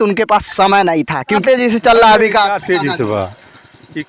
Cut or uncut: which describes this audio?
cut